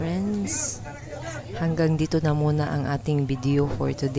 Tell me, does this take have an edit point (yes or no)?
no